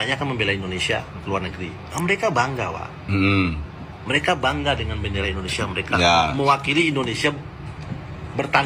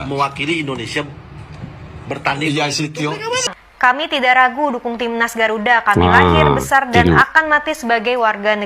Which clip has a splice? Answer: second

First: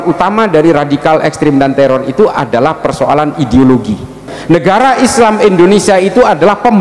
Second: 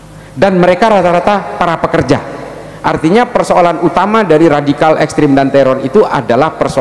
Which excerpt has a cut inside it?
first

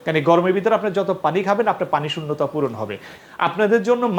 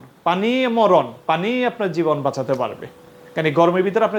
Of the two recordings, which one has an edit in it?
first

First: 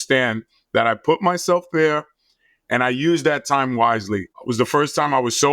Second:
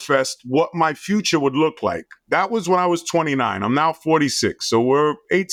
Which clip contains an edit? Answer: first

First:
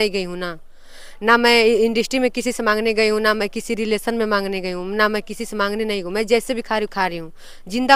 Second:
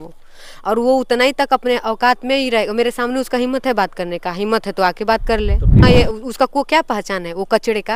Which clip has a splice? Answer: second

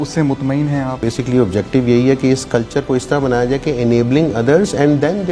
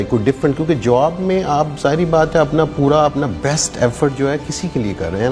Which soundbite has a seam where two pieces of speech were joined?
first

